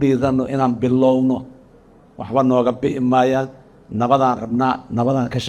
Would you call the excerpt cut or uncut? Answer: uncut